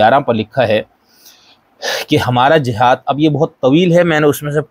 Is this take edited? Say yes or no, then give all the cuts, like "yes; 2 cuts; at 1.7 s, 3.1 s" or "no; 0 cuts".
no; 0 cuts